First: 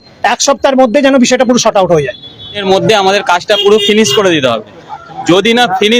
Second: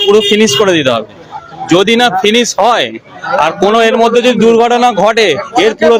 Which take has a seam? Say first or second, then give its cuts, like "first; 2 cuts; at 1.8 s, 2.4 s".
first; 1 cut; at 2.6 s